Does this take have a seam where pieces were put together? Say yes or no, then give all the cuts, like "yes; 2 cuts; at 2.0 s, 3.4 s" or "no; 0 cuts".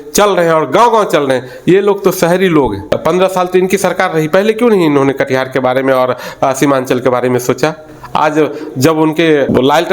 yes; 1 cut; at 2.8 s